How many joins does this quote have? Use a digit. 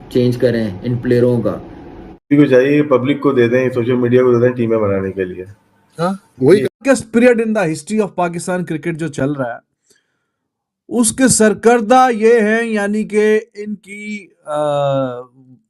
2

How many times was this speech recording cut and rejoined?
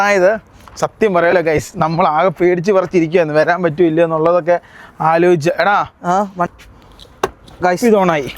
1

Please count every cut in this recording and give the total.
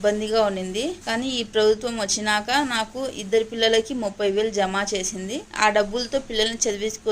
2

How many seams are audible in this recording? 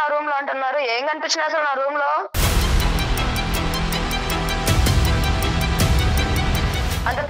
1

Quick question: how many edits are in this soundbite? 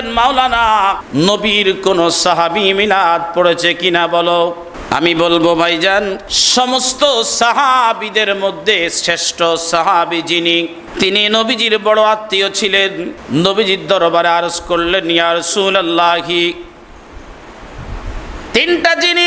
5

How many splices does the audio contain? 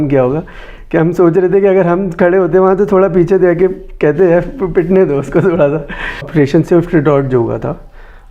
1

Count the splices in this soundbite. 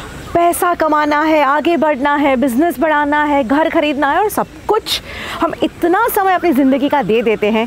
0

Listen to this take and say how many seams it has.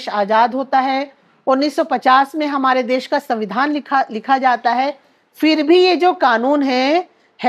0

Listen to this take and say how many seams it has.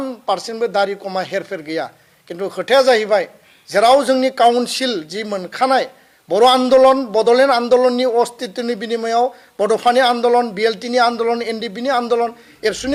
0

